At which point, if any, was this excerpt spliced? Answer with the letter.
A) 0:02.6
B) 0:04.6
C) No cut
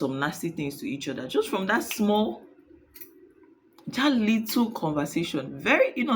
C